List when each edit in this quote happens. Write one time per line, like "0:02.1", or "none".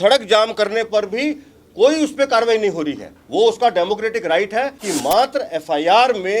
0:04.8